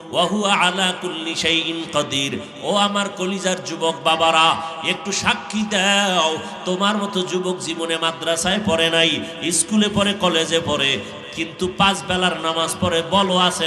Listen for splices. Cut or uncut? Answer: uncut